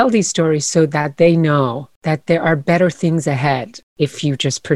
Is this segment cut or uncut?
cut